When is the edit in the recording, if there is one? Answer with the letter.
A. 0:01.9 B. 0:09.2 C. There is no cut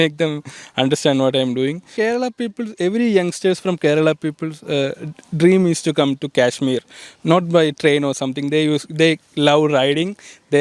A